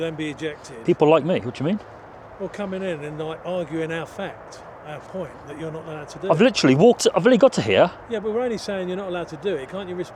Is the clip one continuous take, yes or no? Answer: yes